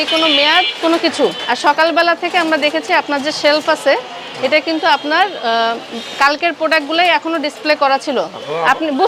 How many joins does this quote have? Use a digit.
0